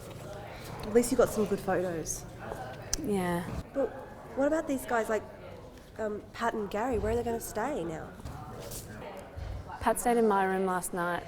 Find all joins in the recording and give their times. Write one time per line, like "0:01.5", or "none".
0:03.6